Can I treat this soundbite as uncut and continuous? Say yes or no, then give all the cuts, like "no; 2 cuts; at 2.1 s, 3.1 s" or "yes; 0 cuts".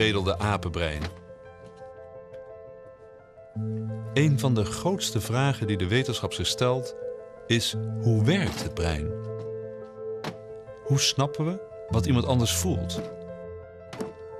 no; 1 cut; at 12.6 s